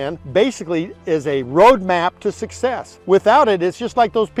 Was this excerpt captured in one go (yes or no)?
yes